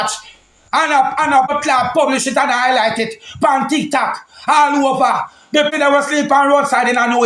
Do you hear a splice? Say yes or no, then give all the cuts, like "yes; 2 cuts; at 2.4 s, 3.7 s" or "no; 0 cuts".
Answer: yes; 2 cuts; at 1.5 s, 5.7 s